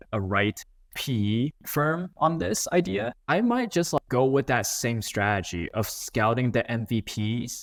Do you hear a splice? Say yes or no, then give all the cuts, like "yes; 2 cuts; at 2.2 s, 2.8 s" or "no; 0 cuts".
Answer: no; 0 cuts